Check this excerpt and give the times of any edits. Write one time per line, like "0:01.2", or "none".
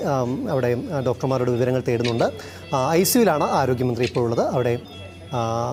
none